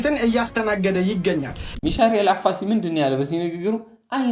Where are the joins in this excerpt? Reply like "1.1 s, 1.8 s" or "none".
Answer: 1.7 s

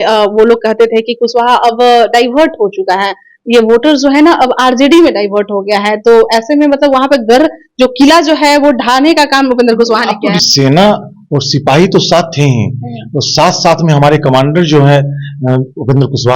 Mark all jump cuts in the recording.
10.4 s

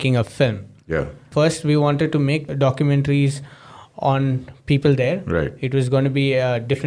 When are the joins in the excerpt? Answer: 1.3 s, 2.5 s

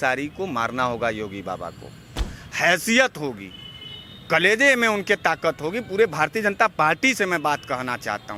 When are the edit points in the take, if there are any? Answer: none

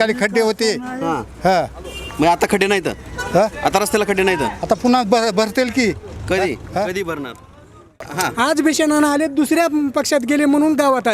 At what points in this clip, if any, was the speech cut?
8.0 s

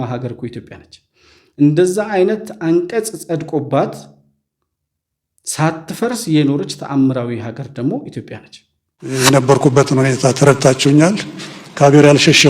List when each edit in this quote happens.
9.1 s

